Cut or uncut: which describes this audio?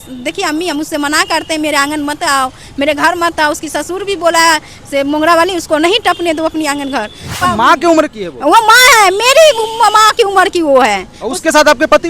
cut